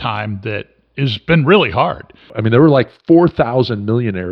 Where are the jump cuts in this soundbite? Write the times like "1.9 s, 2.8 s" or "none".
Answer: 2.3 s